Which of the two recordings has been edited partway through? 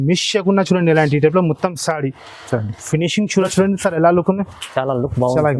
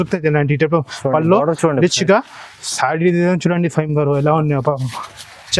first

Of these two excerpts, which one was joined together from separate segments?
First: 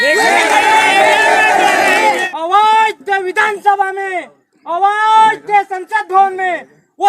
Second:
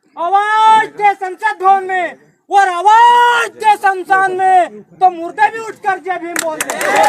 first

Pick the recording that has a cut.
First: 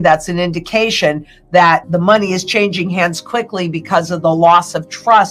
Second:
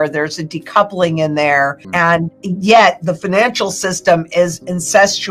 second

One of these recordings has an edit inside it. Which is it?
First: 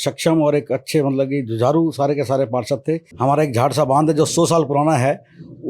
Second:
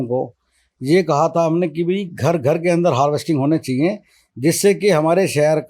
first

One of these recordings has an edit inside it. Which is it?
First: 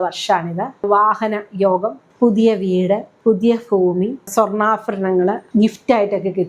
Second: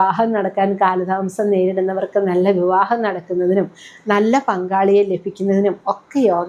first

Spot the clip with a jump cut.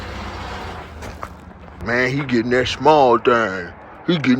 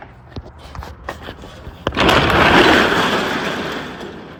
first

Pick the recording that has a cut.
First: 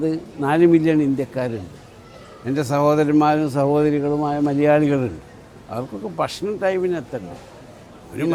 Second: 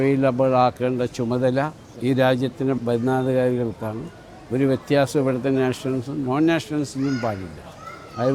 second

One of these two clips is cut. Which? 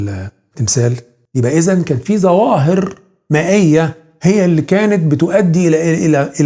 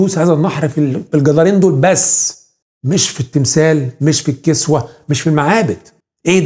first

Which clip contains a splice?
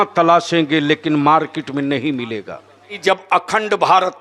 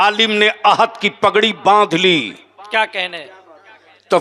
first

